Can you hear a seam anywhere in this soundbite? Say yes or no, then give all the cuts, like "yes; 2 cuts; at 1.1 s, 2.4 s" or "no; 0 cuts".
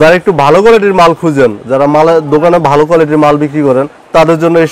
no; 0 cuts